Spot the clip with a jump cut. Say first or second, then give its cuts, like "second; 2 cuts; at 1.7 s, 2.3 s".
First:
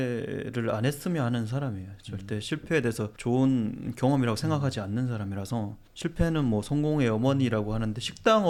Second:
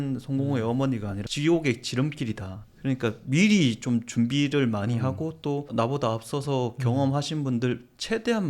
second; 1 cut; at 1.3 s